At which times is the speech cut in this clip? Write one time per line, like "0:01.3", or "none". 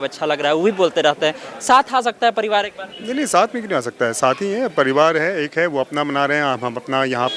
none